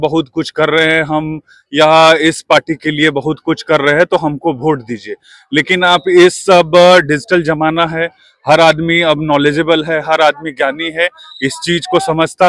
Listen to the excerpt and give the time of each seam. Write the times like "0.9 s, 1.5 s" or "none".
none